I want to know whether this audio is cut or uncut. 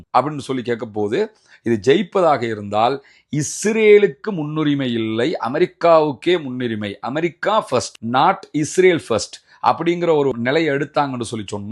uncut